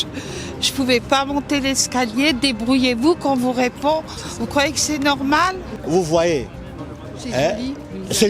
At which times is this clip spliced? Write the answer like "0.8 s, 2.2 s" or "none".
5.8 s